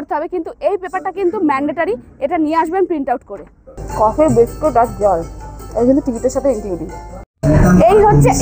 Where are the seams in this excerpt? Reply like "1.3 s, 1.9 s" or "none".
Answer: none